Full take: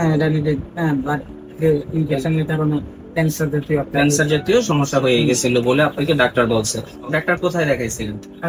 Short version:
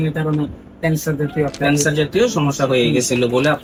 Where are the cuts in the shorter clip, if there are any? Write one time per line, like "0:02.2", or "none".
none